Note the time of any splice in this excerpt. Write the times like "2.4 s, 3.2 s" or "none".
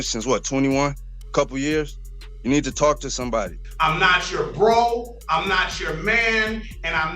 3.6 s